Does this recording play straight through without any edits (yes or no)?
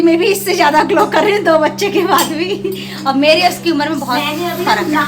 yes